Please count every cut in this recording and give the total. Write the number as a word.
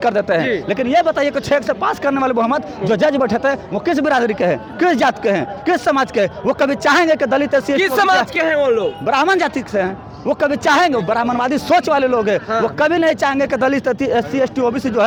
zero